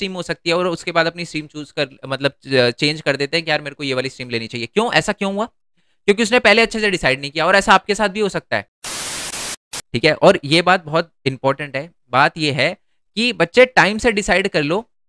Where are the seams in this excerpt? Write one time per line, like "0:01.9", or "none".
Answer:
0:09.2

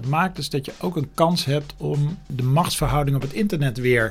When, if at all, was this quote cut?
0:02.3

